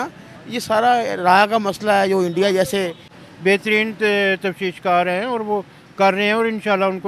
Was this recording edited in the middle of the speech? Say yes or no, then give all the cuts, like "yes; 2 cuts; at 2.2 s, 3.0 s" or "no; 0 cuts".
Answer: yes; 1 cut; at 3.1 s